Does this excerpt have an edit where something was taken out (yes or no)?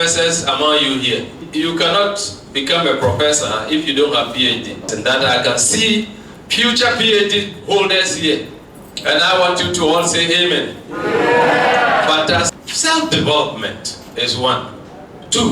yes